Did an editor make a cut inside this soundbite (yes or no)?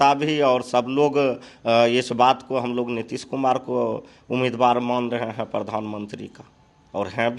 no